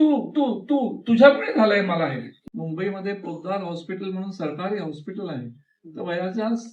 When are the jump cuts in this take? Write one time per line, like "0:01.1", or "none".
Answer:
0:02.3

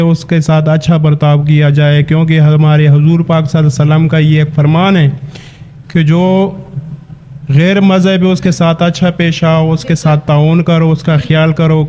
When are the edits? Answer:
none

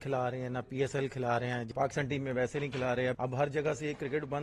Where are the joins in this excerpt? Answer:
0:01.6
0:03.2

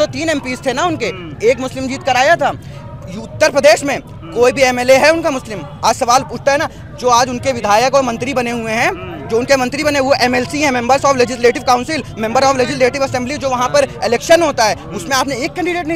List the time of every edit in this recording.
none

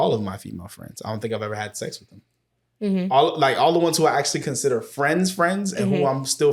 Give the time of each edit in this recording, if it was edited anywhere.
none

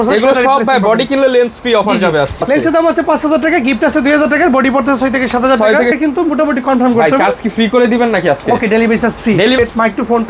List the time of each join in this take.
0:02.4
0:06.0
0:09.6

